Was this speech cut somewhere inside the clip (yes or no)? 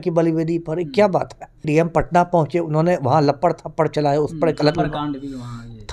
yes